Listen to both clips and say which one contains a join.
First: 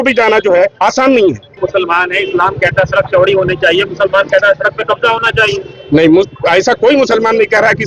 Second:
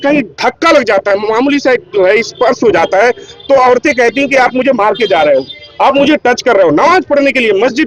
first; 1 cut; at 1.5 s

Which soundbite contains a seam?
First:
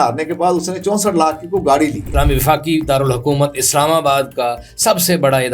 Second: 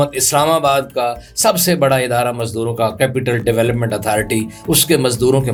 first; 1 cut; at 2.0 s

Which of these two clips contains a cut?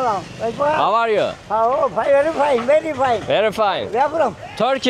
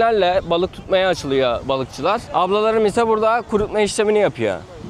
second; 1 cut; at 2.2 s

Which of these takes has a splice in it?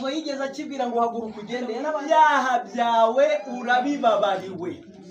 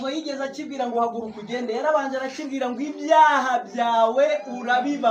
first; 1 cut; at 1.9 s

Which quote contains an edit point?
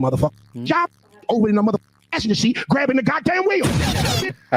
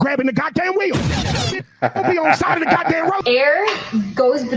second; 1 cut; at 3.2 s

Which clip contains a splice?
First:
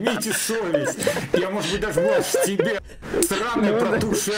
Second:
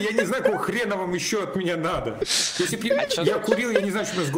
first; 1 cut; at 2.9 s

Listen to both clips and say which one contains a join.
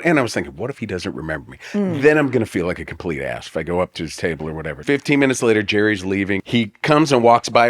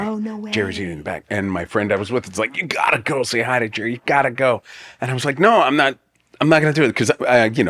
first; 2 cuts; at 4.8 s, 6.4 s

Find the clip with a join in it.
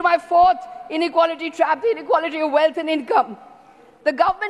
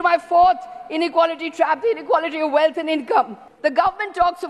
second; 1 cut; at 3.4 s

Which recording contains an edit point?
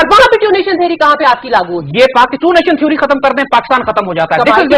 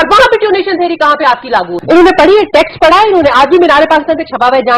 second; 1 cut; at 1.7 s

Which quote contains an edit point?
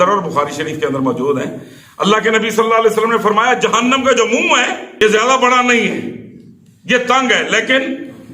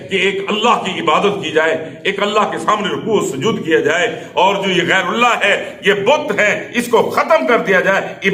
first; 1 cut; at 4.8 s

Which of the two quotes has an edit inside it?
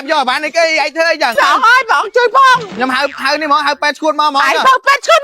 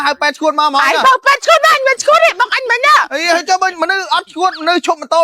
first; 2 cuts; at 1.3 s, 2.7 s

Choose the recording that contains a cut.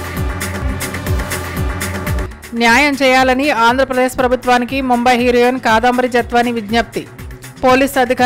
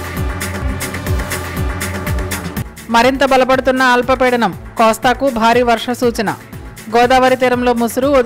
second; 1 cut; at 2.2 s

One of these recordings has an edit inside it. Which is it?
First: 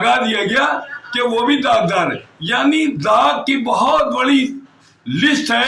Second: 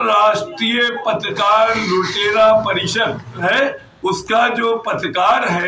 second; 1 cut; at 3.4 s

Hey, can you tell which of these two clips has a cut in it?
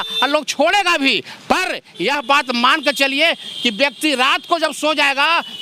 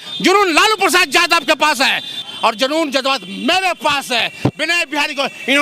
second; 1 cut; at 2.2 s

